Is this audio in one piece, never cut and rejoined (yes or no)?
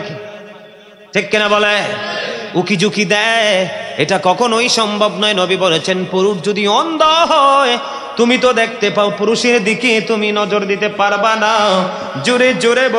yes